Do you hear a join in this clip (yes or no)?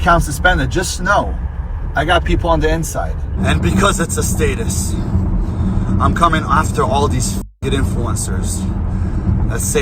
yes